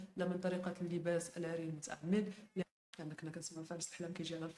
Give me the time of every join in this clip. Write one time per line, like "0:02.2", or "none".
0:02.6